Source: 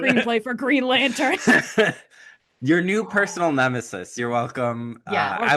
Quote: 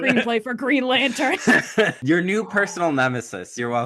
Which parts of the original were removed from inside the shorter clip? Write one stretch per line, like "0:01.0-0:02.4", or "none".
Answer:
0:02.0-0:02.6